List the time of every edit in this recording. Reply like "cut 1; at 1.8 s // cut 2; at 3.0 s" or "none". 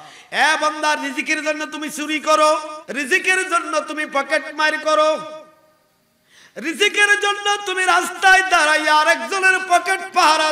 cut 1; at 2.8 s